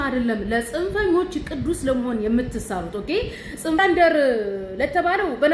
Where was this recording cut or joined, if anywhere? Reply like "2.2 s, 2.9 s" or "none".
3.8 s